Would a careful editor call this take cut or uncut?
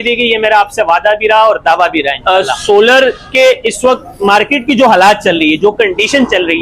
cut